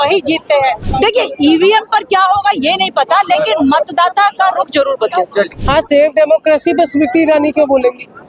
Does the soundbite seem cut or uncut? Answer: cut